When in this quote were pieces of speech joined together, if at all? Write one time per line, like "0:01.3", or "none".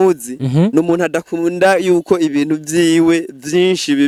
none